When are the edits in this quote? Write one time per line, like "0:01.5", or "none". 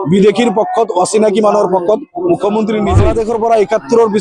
0:03.0